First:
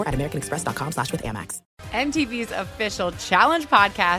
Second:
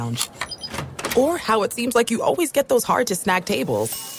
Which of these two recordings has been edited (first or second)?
first